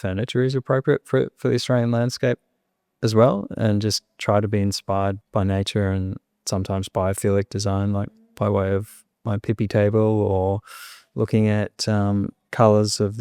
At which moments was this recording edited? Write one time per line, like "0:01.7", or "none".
0:05.2

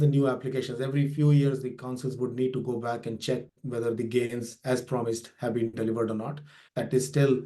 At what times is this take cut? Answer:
0:06.6

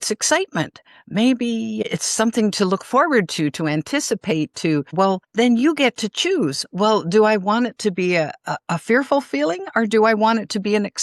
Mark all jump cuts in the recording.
0:01.8
0:05.2

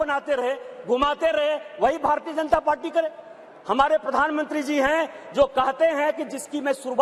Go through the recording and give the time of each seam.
none

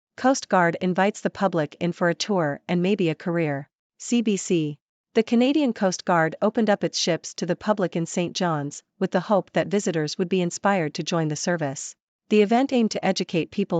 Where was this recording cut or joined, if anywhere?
none

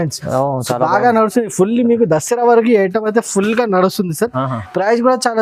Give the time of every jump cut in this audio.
none

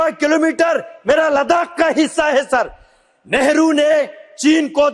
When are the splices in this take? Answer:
none

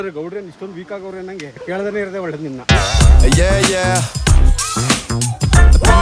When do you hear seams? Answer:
none

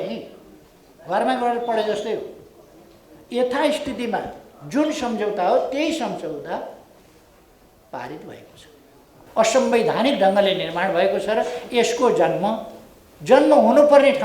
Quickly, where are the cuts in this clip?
0:09.1

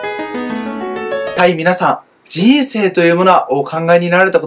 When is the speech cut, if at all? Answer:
0:01.4

